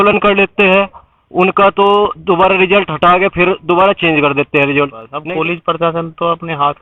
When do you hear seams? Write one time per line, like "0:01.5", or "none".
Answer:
0:05.1